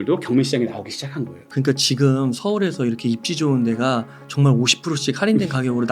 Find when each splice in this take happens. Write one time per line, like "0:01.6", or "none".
0:01.4